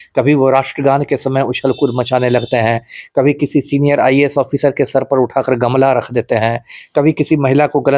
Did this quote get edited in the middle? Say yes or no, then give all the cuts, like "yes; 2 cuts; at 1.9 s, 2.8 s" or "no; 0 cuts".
no; 0 cuts